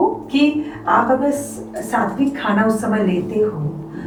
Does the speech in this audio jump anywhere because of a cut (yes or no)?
no